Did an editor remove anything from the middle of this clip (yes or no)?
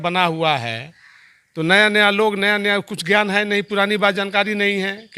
no